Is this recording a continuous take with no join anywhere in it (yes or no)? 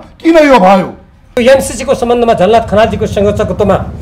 no